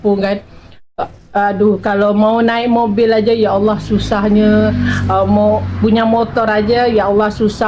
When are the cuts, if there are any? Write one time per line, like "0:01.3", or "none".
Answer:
none